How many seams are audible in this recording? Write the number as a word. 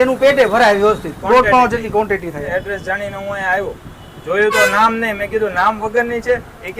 one